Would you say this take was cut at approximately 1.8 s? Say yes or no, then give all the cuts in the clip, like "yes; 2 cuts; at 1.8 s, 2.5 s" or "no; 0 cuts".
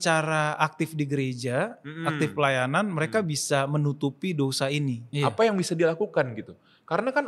no; 1 cut; at 5.0 s